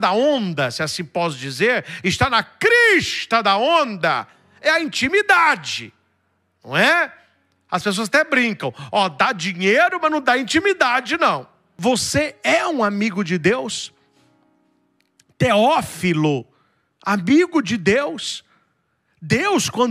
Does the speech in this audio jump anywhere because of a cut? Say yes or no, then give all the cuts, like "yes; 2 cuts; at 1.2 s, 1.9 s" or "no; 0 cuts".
yes; 1 cut; at 11.7 s